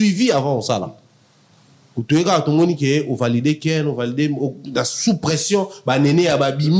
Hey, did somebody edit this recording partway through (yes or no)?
no